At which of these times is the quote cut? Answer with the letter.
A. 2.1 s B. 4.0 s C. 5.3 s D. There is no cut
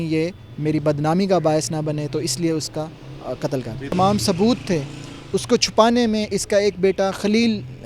B